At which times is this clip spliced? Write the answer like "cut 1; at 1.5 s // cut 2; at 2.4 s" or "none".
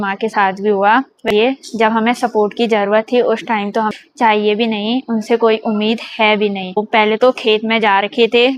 cut 1; at 1.2 s // cut 2; at 3.9 s // cut 3; at 6.8 s